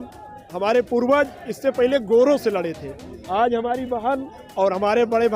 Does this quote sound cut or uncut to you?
uncut